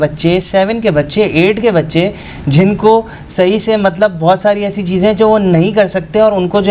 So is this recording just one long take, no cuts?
yes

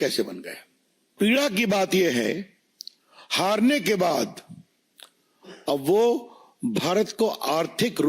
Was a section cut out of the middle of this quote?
yes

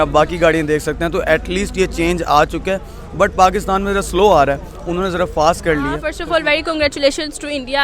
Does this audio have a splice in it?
yes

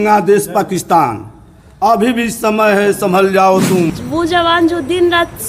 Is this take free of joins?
no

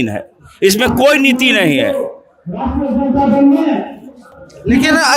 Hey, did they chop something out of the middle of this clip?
no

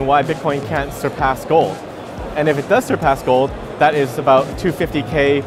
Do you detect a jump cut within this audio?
no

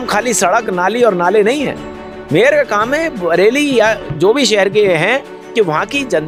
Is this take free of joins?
yes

